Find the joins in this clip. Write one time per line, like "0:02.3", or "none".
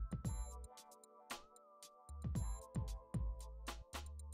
none